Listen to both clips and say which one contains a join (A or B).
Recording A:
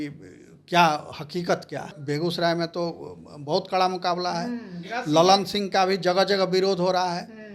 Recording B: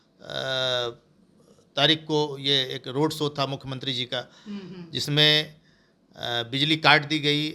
A